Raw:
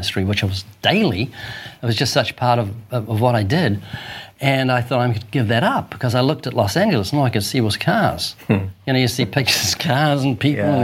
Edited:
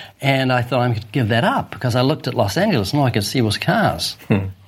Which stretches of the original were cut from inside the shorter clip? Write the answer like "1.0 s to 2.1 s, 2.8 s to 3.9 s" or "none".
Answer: none